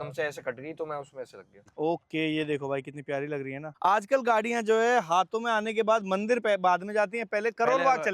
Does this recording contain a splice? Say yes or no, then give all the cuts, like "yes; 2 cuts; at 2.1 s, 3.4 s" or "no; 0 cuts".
yes; 2 cuts; at 1.6 s, 3.7 s